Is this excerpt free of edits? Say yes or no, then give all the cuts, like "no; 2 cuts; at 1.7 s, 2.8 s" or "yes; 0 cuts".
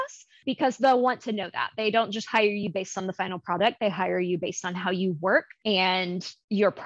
yes; 0 cuts